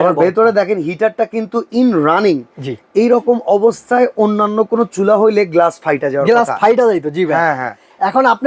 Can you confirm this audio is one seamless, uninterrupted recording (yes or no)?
yes